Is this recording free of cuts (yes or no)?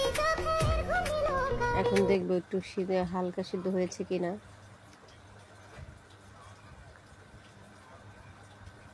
no